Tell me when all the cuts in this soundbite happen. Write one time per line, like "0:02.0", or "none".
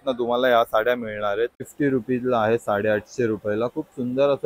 0:01.7